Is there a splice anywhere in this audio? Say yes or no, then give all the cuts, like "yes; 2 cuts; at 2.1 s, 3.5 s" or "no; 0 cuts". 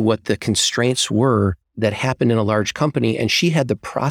yes; 1 cut; at 1.6 s